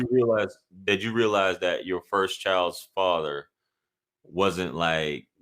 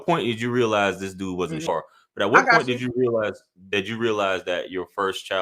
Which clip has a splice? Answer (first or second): second